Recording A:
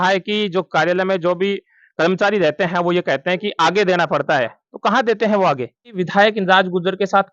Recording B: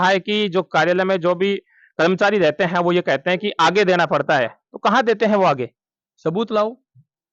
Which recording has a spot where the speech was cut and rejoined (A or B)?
A